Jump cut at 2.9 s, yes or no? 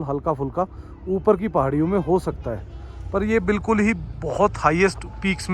no